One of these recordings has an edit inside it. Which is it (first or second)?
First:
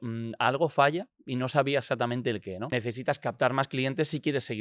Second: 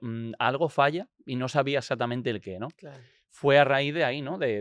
first